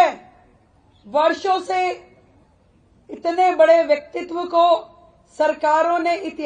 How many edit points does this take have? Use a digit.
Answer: 0